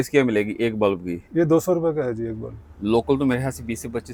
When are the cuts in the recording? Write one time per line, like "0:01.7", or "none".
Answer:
none